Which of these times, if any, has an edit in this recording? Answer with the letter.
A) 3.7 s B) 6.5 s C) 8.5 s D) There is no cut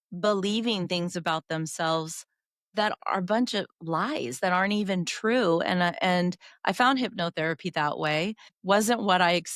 C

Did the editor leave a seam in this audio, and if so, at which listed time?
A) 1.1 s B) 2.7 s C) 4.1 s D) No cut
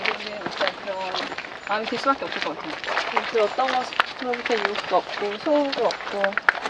B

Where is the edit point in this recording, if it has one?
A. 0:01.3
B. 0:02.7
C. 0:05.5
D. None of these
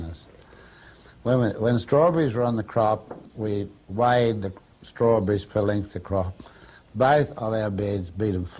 C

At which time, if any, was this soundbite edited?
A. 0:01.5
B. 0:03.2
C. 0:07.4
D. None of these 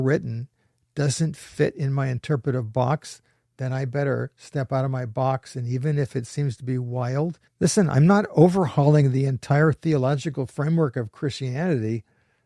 C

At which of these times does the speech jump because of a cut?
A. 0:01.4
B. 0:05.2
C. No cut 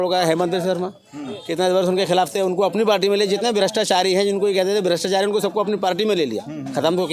C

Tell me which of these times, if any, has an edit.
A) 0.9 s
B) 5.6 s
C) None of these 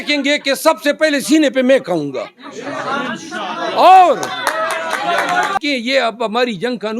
B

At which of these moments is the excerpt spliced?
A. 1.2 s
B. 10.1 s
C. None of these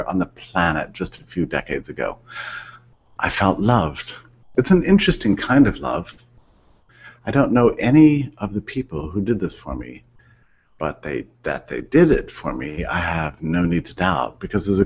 A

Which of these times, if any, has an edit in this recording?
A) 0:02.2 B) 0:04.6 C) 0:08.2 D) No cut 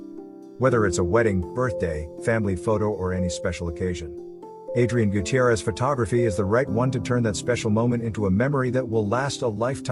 D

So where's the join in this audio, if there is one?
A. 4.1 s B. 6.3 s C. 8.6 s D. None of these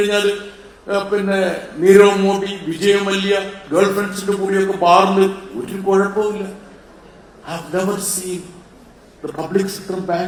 D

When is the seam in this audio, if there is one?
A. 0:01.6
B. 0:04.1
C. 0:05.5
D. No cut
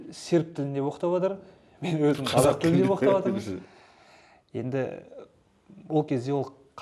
D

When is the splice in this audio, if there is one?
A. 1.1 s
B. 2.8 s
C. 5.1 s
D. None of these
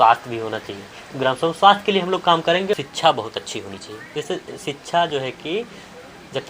B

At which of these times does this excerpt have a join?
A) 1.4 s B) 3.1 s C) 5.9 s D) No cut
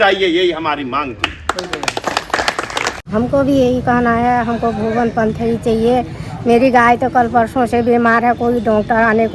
B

